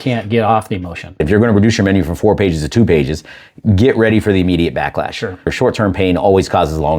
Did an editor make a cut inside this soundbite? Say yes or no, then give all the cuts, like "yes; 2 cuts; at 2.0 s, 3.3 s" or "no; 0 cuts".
yes; 2 cuts; at 1.2 s, 5.5 s